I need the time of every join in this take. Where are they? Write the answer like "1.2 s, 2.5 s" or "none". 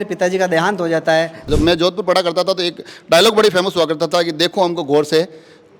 1.4 s